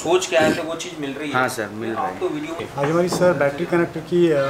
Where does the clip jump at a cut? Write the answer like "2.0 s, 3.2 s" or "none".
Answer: 2.6 s

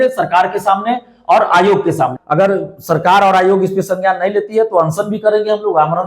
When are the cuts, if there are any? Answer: 2.1 s

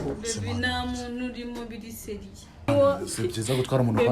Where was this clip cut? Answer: 2.7 s

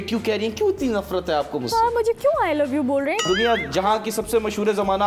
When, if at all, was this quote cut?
3.2 s

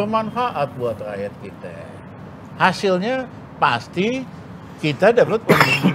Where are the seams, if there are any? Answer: none

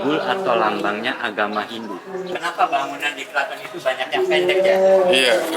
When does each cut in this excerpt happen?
2.3 s

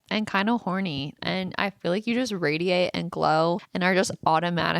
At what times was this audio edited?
3.7 s

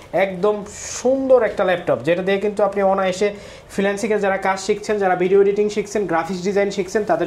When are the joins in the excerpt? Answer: none

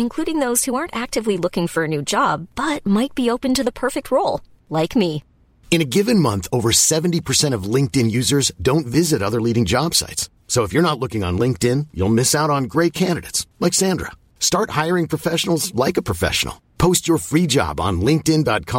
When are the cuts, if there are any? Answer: none

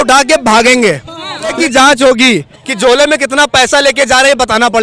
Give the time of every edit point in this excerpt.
1.6 s

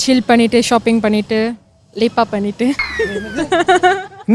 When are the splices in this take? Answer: 2.9 s

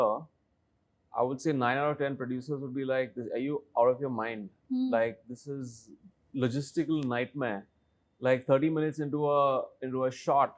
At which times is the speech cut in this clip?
none

